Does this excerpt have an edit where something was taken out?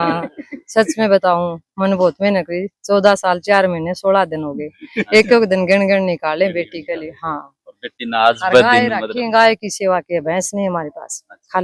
no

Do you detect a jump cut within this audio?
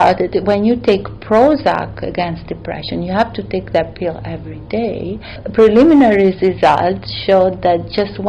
yes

